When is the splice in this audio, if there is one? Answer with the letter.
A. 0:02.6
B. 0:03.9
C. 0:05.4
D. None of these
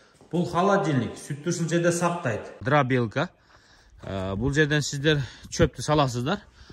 A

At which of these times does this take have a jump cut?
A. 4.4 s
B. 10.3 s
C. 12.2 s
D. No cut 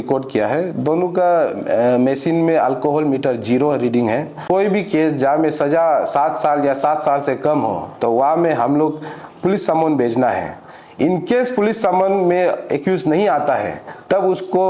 A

